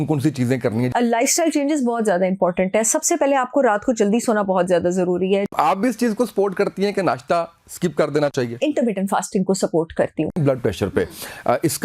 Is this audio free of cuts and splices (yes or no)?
no